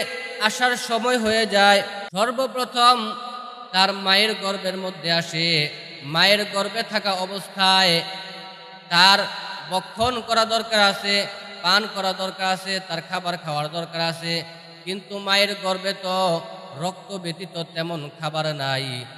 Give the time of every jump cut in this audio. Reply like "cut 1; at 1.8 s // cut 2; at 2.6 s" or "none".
cut 1; at 2.0 s